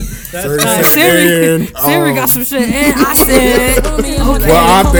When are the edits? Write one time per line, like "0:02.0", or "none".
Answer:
none